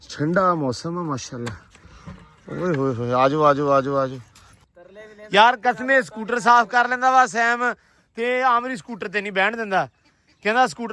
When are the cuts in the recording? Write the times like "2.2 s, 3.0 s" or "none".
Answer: 4.5 s